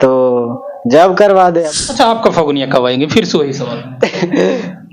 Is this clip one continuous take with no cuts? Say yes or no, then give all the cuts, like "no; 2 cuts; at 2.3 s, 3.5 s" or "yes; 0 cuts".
no; 1 cut; at 1.7 s